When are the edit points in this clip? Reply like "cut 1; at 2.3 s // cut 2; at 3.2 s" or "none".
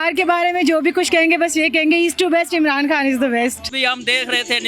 cut 1; at 3.7 s